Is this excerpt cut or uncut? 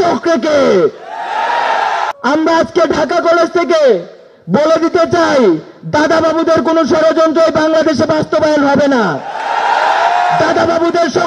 cut